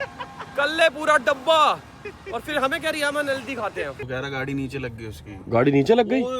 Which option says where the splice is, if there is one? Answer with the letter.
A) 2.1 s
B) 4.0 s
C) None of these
B